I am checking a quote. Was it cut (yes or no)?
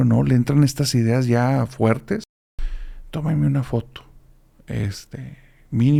no